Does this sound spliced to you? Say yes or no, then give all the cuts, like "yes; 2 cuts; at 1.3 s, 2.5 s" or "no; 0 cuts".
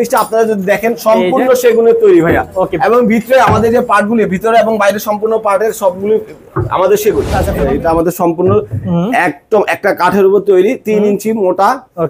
yes; 1 cut; at 7.5 s